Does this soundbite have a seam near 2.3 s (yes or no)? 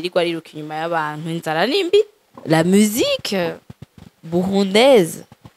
yes